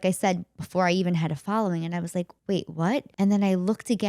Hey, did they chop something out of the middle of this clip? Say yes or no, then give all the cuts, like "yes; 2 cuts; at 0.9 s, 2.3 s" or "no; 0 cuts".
yes; 2 cuts; at 2.3 s, 3.1 s